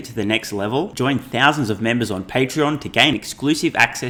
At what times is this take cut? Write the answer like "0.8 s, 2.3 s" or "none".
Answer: none